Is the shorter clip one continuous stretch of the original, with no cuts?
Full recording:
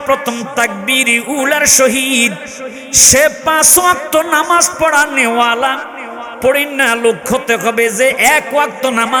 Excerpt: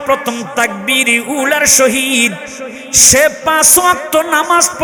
yes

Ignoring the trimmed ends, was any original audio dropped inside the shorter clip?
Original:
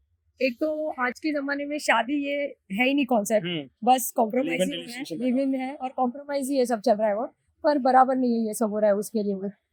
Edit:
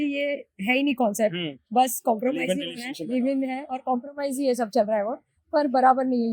no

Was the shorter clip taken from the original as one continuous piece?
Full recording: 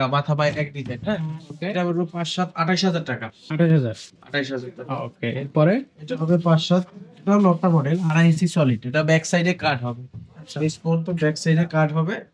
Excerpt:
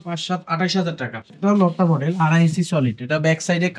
no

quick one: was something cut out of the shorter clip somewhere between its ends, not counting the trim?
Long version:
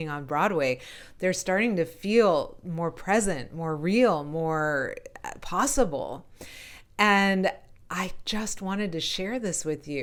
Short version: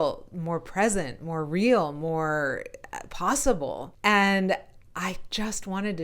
yes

